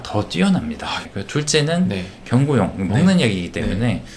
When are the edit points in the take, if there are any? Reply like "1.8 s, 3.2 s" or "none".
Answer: 1.1 s